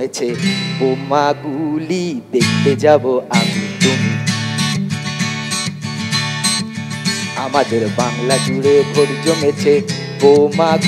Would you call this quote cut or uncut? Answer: uncut